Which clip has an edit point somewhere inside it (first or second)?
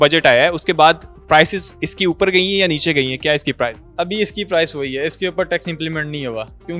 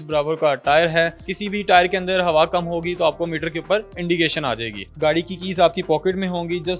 second